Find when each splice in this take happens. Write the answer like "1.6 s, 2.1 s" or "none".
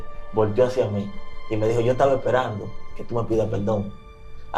none